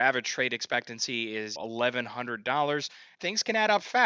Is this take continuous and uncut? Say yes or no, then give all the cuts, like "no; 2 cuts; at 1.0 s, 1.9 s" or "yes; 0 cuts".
no; 2 cuts; at 1.6 s, 3.1 s